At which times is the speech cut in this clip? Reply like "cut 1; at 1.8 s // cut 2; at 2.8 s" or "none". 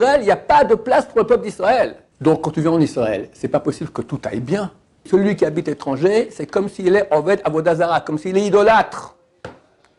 cut 1; at 2.0 s // cut 2; at 5.1 s

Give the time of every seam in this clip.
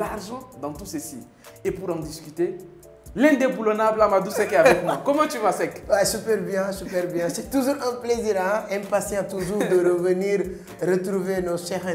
none

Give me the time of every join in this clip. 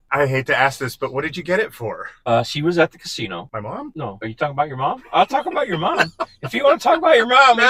cut 1; at 2.1 s // cut 2; at 3.7 s

